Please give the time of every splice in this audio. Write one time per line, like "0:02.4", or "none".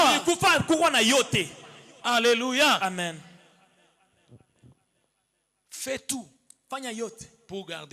none